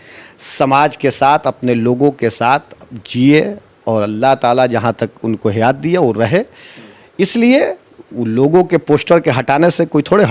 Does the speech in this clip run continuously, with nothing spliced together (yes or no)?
yes